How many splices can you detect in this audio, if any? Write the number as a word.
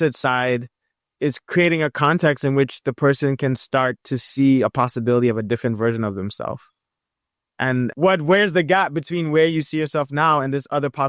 zero